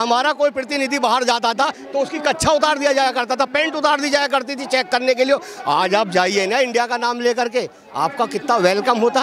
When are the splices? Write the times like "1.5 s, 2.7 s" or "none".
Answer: none